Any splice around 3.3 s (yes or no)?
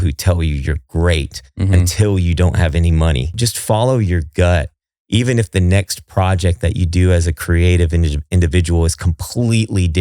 yes